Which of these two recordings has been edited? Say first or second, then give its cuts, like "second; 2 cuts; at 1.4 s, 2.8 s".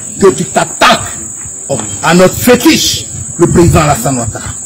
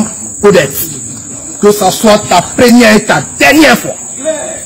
first; 1 cut; at 1.9 s